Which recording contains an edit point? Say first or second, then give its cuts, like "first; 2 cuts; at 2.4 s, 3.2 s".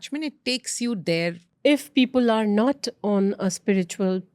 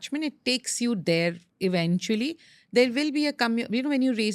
first; 1 cut; at 1.4 s